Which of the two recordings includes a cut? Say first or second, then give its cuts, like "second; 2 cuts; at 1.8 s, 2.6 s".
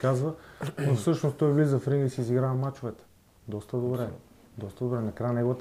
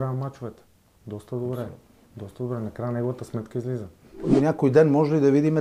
second; 1 cut; at 4.3 s